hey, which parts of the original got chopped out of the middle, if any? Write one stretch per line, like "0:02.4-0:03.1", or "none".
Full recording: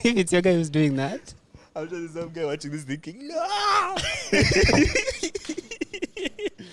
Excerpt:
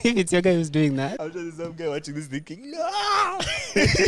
0:01.2-0:01.7